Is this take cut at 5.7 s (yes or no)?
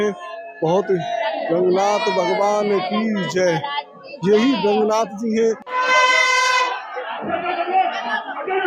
yes